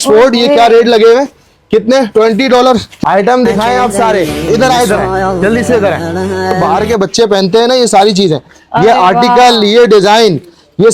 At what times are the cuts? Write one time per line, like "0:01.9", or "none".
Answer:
0:02.9
0:04.5
0:06.5